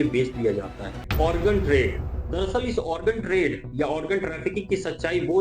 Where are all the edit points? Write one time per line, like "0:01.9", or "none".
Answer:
0:01.0